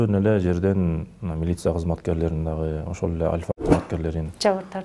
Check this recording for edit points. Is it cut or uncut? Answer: uncut